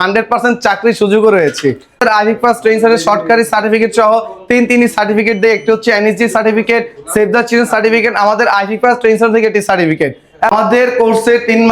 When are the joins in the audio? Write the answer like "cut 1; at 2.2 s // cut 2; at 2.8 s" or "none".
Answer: cut 1; at 2.0 s // cut 2; at 10.5 s